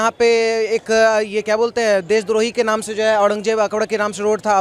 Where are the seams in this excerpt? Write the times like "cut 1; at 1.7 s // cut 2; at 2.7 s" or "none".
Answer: none